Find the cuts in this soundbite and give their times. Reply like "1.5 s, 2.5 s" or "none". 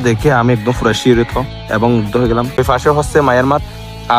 2.6 s